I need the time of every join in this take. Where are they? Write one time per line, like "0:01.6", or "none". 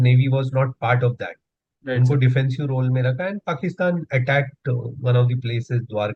none